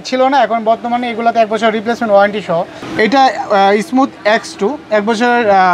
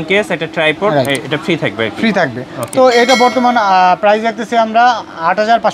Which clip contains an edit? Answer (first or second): first